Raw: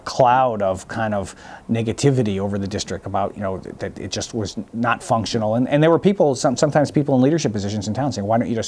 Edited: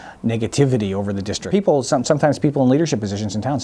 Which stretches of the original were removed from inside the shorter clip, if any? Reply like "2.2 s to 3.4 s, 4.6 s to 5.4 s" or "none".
2.9 s to 6.0 s